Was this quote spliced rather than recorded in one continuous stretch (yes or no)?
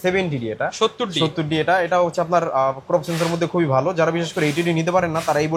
no